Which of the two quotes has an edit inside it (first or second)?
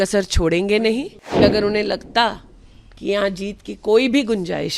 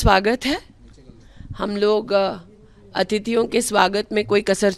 first